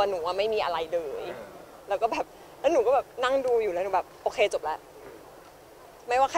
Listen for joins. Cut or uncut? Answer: uncut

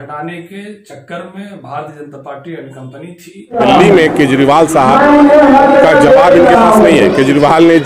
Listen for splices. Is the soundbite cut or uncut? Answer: cut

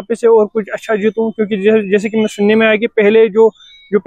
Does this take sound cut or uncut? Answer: uncut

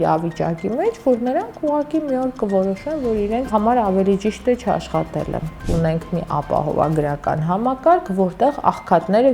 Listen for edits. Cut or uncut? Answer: cut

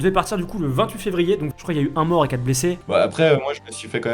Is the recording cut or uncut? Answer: cut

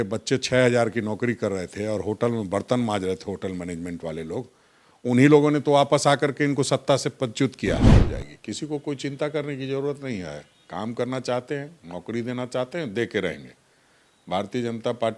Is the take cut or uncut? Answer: cut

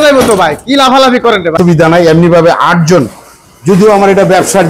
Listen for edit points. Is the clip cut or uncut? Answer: cut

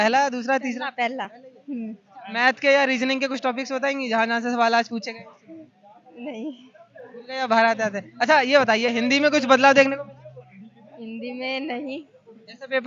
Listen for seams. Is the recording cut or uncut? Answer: uncut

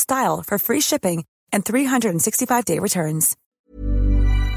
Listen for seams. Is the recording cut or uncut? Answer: cut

